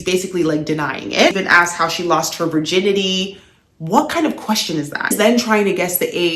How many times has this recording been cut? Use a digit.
2